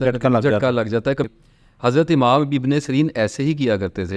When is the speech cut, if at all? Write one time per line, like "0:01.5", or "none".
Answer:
0:01.3